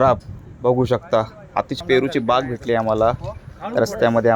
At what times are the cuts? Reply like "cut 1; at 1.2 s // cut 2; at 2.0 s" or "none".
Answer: cut 1; at 1.7 s